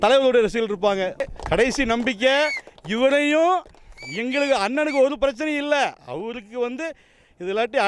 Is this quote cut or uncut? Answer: cut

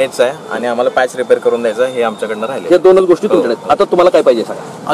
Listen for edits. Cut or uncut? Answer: uncut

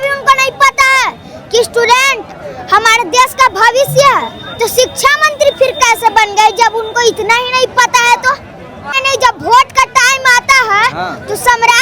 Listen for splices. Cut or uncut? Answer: cut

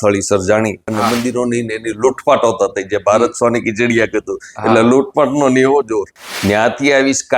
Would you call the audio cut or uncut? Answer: cut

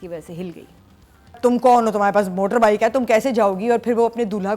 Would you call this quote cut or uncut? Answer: cut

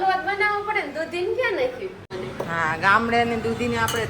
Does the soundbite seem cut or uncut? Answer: cut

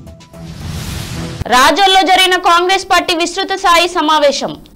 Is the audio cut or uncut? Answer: uncut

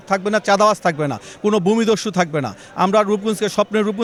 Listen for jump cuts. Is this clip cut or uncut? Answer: uncut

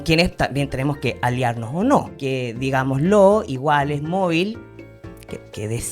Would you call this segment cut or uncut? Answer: cut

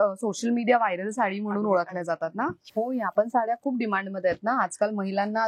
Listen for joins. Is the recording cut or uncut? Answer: cut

